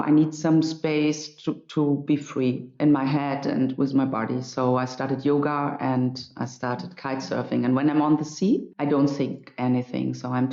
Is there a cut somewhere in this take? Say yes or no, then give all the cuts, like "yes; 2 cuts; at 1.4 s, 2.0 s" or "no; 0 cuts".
yes; 2 cuts; at 2.7 s, 8.7 s